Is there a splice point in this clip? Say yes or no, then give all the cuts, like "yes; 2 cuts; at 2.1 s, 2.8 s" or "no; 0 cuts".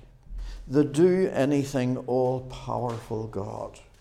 no; 0 cuts